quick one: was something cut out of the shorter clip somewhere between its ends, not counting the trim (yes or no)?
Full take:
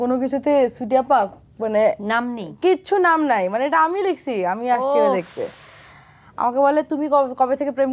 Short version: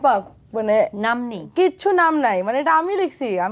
no